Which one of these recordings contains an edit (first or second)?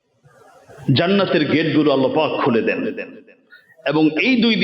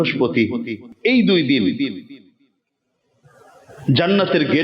second